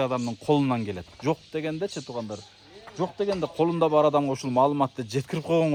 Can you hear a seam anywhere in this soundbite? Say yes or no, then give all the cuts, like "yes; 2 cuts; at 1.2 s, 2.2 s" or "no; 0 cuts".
no; 0 cuts